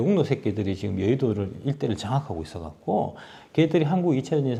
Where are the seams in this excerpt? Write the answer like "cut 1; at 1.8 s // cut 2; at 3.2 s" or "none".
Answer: none